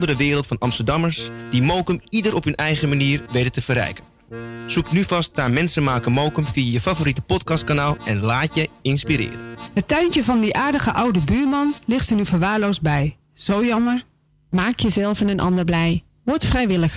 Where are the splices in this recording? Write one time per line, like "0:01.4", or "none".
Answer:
0:09.7